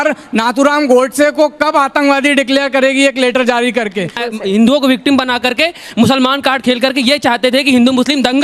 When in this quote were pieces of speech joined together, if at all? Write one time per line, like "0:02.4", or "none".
0:04.2